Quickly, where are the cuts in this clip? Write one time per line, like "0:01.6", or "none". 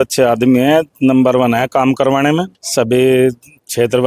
0:02.6